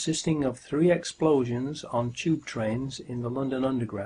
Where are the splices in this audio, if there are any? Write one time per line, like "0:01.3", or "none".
0:03.0